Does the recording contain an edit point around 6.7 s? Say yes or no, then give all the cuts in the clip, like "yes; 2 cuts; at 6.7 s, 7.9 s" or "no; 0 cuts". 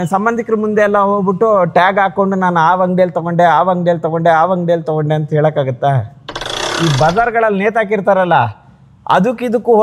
yes; 1 cut; at 6.7 s